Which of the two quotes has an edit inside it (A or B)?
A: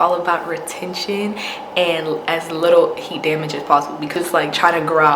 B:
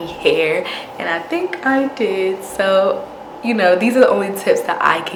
A